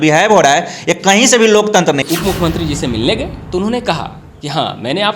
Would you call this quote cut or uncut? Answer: cut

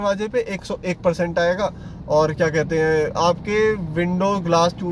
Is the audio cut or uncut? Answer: uncut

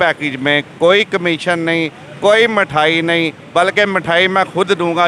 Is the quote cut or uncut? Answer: uncut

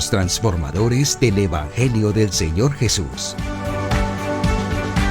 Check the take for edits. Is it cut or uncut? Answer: cut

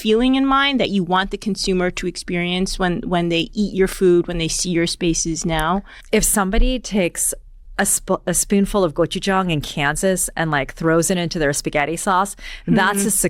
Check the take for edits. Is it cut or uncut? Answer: cut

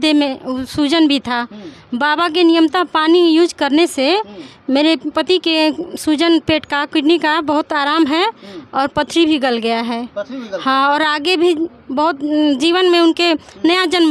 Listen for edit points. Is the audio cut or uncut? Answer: uncut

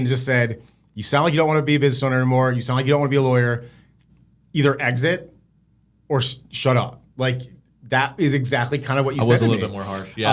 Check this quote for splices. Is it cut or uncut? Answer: uncut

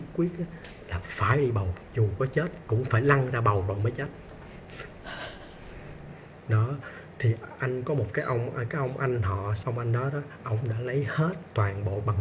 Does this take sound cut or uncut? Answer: cut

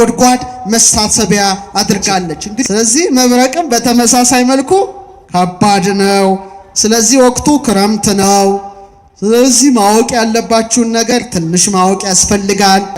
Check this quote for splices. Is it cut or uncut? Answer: cut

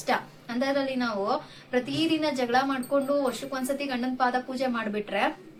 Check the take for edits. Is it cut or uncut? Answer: uncut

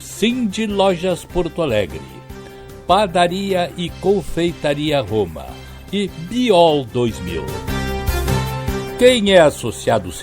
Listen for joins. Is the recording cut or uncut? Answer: cut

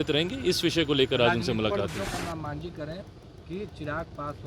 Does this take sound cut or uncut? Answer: cut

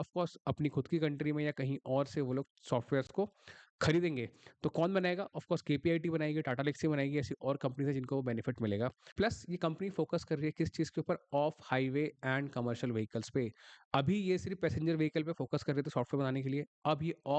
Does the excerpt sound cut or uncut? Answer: cut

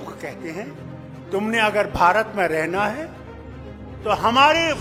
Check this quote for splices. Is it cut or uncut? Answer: uncut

